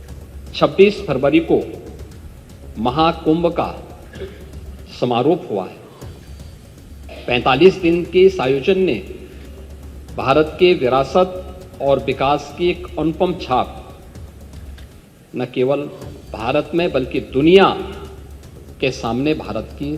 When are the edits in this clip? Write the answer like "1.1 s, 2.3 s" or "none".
none